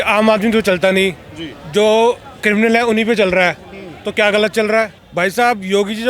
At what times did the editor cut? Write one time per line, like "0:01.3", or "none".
0:05.0